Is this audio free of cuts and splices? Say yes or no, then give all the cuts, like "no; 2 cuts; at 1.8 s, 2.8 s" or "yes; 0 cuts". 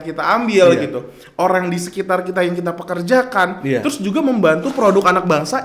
yes; 0 cuts